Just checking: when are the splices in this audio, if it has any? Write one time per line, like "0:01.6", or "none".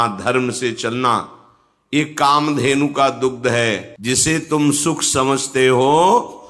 0:03.9